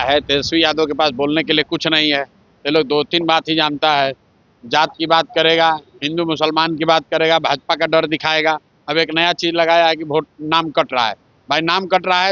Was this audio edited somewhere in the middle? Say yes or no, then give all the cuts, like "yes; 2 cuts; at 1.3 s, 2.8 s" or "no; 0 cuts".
no; 0 cuts